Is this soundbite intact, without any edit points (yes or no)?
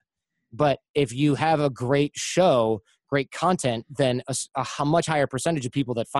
yes